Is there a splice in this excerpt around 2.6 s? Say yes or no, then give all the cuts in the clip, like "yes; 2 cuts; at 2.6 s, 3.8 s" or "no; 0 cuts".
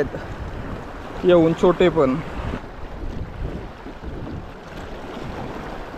yes; 1 cut; at 2.6 s